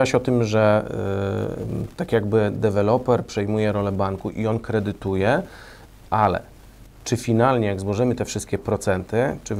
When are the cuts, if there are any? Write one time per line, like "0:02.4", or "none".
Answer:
none